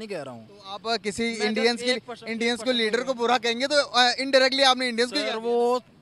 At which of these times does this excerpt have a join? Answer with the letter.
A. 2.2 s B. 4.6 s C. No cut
C